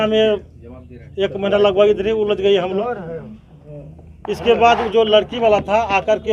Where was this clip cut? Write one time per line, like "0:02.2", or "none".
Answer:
none